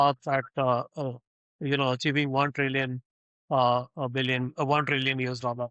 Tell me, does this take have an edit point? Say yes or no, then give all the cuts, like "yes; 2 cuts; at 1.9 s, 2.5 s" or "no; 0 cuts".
no; 0 cuts